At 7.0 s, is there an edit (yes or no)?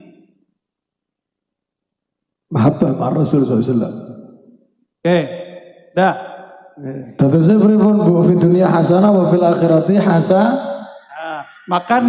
yes